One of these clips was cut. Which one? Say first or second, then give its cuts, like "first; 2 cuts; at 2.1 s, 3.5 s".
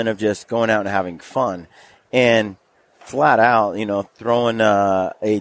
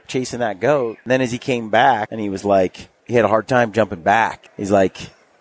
second; 4 cuts; at 1.0 s, 2.1 s, 2.9 s, 4.4 s